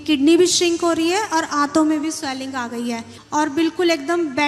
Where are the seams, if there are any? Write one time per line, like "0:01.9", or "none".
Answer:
0:03.2